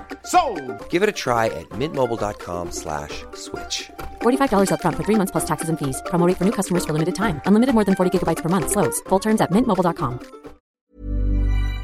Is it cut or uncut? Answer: cut